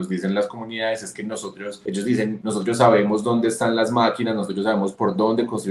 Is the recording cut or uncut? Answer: cut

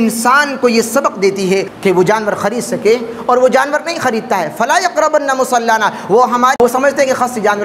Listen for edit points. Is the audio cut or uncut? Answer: cut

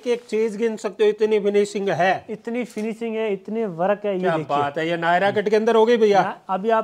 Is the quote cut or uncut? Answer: uncut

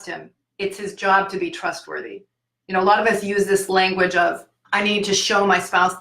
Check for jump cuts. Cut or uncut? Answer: cut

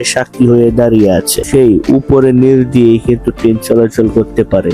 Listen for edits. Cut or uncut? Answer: cut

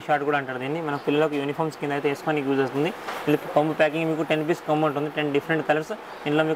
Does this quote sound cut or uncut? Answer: uncut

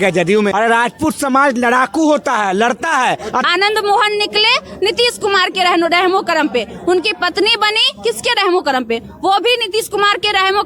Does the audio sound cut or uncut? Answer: cut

